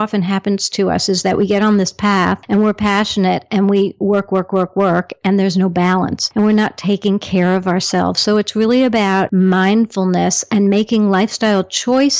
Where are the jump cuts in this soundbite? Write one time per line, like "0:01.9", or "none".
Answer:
0:02.4
0:06.2
0:09.3